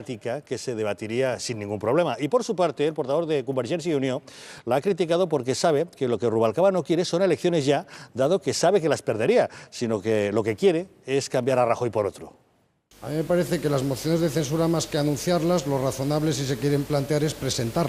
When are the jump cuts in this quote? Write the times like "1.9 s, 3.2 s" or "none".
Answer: 6.3 s